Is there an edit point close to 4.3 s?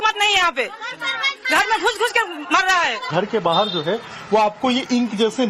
no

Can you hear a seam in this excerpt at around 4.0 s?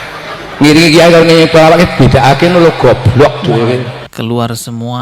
yes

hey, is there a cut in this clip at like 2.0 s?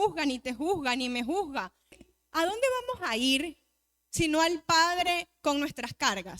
yes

